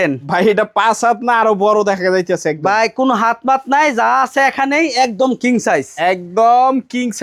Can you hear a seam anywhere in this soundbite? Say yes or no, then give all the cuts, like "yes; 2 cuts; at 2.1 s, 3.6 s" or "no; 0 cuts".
no; 0 cuts